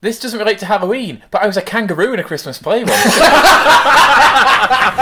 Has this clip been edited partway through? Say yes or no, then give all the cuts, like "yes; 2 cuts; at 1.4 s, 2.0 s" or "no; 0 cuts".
no; 0 cuts